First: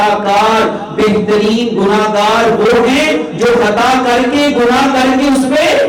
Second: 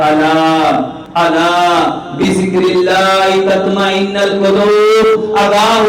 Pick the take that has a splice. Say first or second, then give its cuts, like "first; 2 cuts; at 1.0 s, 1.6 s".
second; 1 cut; at 1.0 s